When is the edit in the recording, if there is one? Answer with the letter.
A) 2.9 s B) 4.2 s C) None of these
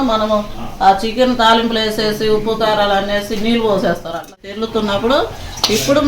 B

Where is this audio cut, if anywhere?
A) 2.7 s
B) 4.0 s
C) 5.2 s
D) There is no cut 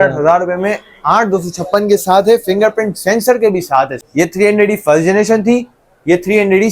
B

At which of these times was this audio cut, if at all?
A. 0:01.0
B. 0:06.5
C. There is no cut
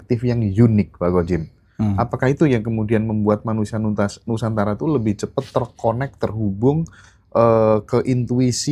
C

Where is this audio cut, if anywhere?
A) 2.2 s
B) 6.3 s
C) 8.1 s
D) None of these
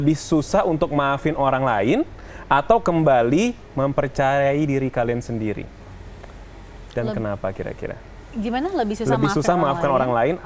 D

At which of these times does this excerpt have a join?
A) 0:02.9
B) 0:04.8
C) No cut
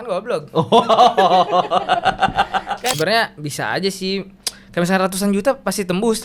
A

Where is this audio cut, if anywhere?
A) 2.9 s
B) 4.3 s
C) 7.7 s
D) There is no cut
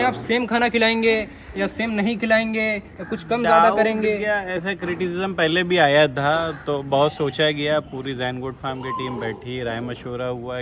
D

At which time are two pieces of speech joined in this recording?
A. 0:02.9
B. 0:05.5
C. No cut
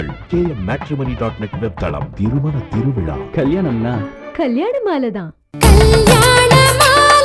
B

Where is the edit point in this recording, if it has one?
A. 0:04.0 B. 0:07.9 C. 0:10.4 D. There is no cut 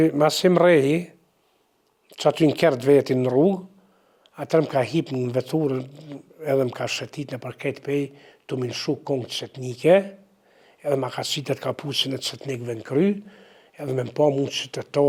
D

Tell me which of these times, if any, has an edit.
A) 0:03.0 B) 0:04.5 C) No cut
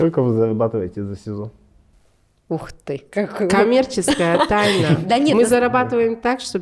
C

